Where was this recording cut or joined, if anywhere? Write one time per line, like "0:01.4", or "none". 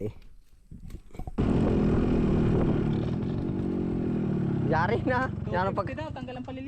0:01.4